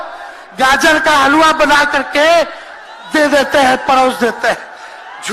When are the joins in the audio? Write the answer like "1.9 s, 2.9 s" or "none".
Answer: none